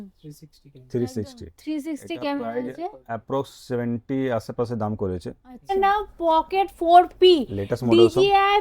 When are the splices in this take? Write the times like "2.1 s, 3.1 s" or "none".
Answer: 5.7 s